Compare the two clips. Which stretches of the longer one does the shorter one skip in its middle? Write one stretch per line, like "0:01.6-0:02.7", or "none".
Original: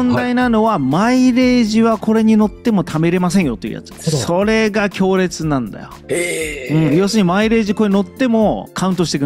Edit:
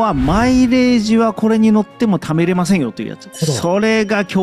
none